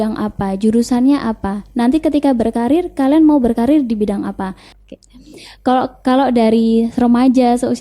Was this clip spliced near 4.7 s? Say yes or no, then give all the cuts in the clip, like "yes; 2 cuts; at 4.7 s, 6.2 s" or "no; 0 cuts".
yes; 1 cut; at 4.7 s